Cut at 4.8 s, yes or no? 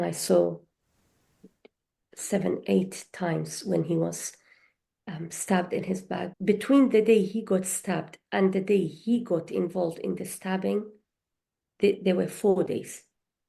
no